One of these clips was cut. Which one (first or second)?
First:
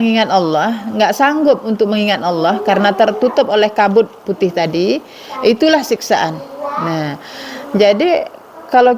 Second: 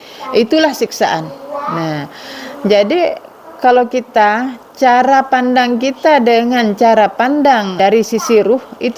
second